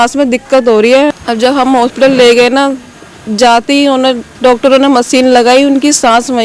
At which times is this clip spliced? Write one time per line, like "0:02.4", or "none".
0:01.1